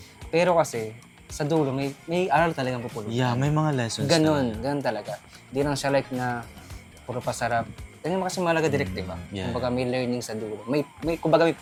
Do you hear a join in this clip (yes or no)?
no